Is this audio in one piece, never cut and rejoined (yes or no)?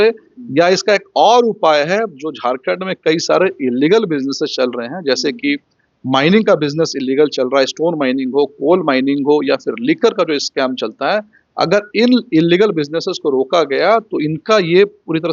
yes